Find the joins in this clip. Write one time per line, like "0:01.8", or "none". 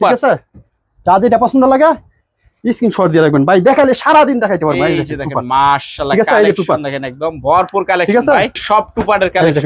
0:08.6